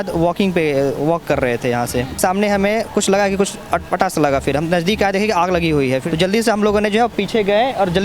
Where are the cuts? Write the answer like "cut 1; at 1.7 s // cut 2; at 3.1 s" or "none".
cut 1; at 2.2 s // cut 2; at 6.0 s